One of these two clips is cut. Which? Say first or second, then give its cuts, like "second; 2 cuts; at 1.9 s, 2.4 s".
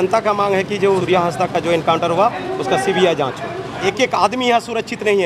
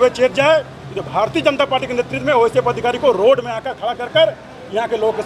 first; 2 cuts; at 1.0 s, 3.7 s